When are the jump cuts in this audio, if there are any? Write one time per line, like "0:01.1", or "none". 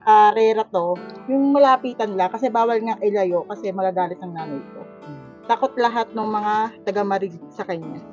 none